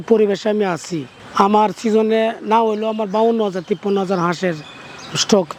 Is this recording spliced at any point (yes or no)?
no